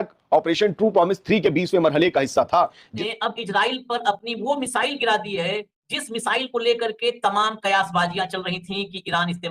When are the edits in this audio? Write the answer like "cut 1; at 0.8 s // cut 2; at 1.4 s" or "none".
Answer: cut 1; at 2.8 s